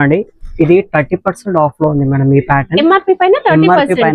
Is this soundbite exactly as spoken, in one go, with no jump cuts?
yes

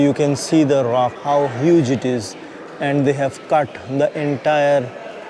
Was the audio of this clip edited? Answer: yes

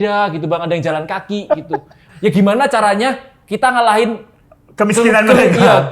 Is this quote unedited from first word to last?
no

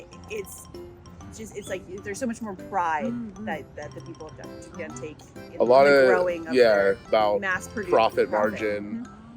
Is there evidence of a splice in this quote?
yes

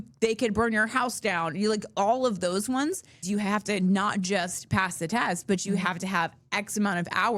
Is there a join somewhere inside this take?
yes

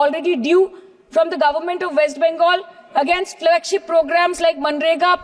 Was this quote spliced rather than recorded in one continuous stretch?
no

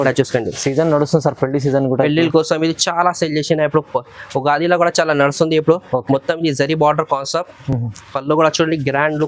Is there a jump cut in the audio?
no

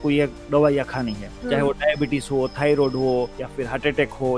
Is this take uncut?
no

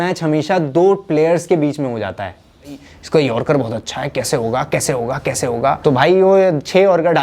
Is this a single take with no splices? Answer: no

